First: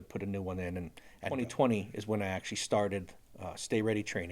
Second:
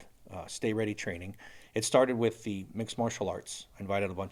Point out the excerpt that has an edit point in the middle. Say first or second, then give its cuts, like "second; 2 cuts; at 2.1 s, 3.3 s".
first; 1 cut; at 1.3 s